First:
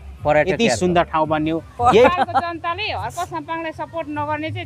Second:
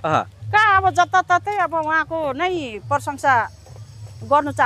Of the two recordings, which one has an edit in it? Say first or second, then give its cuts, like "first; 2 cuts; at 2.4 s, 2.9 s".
first; 1 cut; at 2.1 s